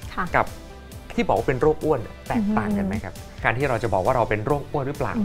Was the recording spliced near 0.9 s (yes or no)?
no